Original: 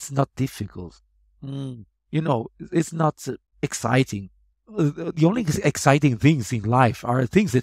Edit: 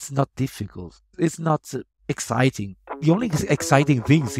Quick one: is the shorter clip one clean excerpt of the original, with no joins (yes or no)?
no